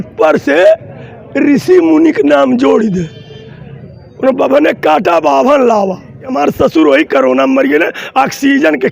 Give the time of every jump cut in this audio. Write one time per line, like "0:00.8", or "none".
0:06.3